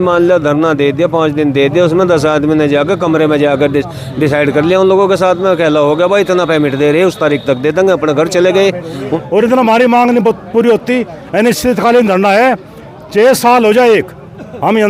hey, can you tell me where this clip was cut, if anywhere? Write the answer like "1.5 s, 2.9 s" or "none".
9.1 s

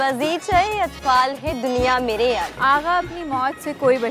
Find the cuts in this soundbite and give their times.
2.5 s

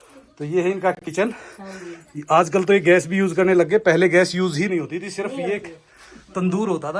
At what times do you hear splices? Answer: none

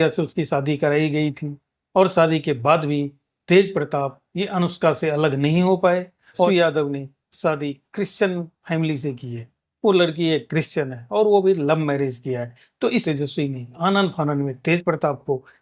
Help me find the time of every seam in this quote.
6.5 s, 13.0 s

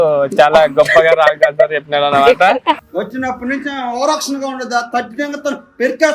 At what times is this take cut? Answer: none

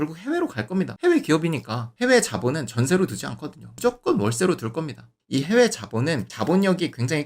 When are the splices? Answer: 1.8 s, 5.1 s

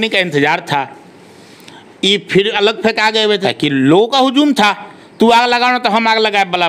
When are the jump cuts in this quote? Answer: 3.4 s

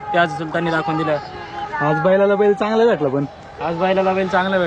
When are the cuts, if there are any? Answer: none

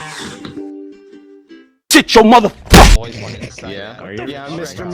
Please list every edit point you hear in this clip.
3.0 s

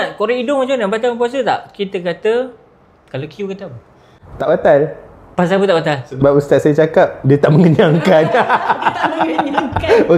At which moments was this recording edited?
none

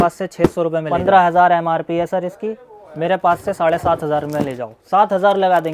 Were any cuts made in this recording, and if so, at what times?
0.9 s

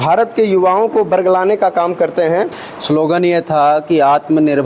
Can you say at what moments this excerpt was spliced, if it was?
2.7 s

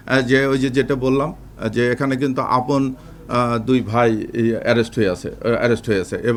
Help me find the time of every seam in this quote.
none

